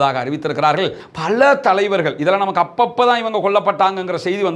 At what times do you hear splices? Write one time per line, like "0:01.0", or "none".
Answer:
0:01.0